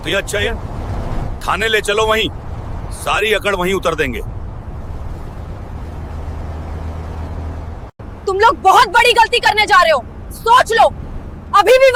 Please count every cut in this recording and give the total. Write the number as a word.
zero